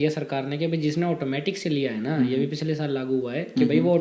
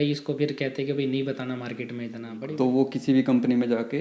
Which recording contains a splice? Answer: second; 1 cut; at 2.3 s

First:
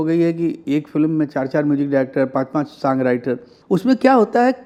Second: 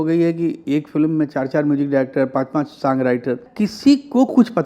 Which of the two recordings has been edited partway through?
second; 1 cut; at 3.5 s

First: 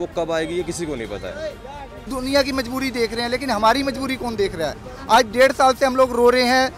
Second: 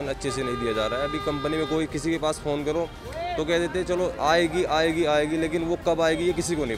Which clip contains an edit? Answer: first; 1 cut; at 2.1 s

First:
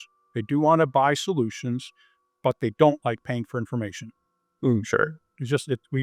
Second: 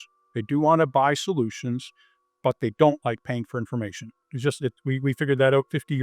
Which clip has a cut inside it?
second; 1 cut; at 4.2 s

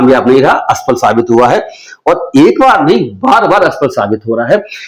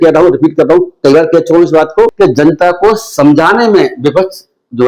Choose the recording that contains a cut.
second; 1 cut; at 2.1 s

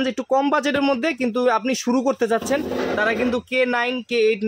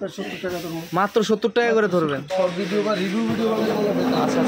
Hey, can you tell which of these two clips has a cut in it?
second; 1 cut; at 2.3 s

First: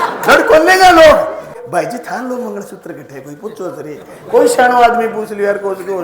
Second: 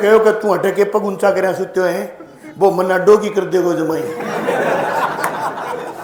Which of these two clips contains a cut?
first; 1 cut; at 1.6 s

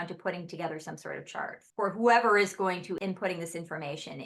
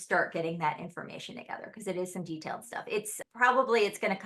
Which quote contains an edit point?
first; 2 cuts; at 1.6 s, 3.0 s

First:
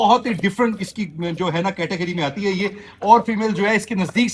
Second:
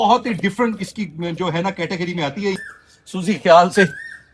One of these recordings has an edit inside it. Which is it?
second; 1 cut; at 2.6 s

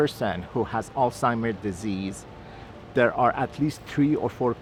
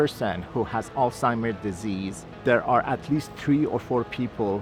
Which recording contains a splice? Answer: second; 1 cut; at 2.2 s

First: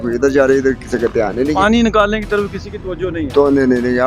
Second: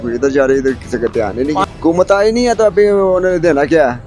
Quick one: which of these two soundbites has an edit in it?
second; 1 cut; at 1.7 s

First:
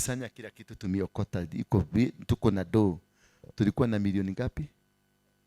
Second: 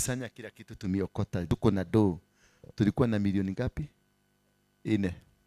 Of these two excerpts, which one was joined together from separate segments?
second; 1 cut; at 1.4 s

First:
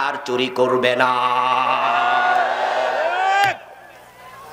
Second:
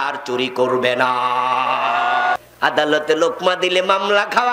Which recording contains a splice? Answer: second; 1 cut; at 2.3 s

